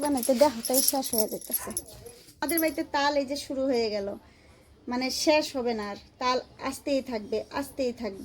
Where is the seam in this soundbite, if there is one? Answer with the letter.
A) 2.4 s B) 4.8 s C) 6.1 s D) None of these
A